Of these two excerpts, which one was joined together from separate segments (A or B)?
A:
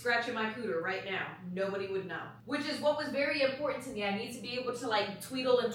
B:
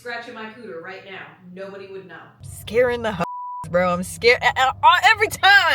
B